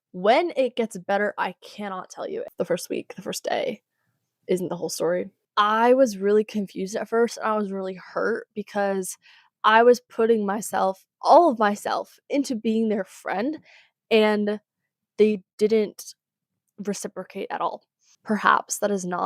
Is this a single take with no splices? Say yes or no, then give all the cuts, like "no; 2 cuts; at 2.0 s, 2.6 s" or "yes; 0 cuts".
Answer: no; 3 cuts; at 2.5 s, 5.4 s, 18.1 s